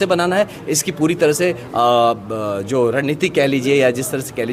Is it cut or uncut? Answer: uncut